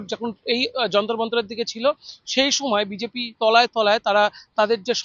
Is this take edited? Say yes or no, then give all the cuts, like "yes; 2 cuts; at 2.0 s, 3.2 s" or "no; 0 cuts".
no; 0 cuts